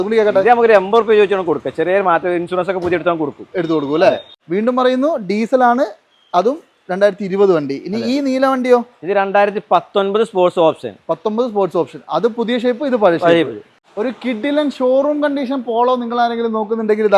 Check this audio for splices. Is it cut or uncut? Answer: cut